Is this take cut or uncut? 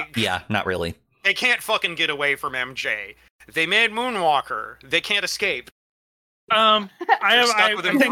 cut